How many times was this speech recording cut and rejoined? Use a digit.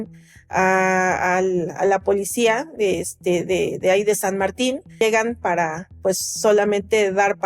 1